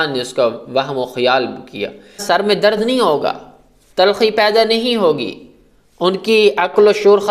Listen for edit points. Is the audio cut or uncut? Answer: cut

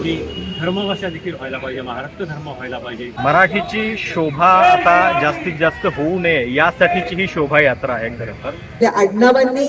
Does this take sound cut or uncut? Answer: cut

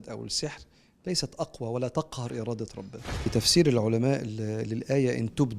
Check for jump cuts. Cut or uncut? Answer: cut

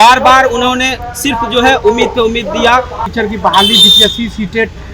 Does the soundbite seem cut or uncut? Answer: cut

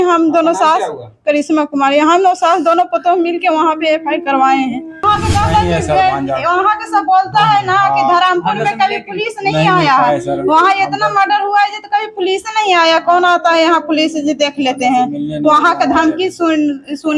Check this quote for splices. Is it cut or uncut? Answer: cut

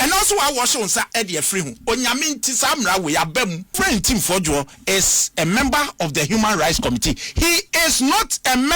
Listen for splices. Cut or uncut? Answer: cut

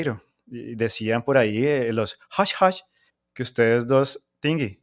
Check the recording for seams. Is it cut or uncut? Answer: uncut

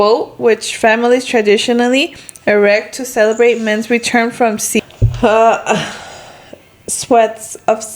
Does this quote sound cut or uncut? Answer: cut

